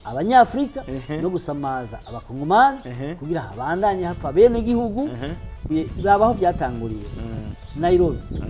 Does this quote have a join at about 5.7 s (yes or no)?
yes